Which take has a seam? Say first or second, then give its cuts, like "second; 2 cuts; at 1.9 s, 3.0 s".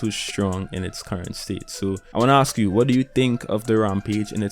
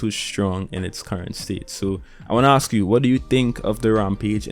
first; 1 cut; at 2.1 s